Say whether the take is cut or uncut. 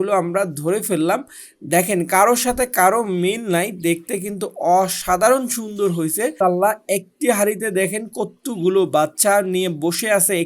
cut